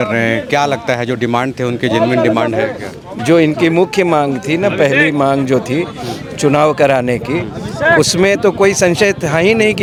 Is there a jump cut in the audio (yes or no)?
no